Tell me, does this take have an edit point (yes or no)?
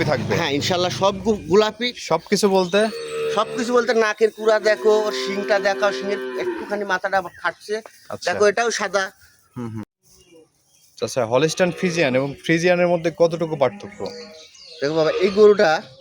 yes